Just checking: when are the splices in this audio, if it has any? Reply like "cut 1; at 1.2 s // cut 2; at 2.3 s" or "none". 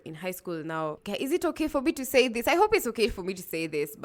none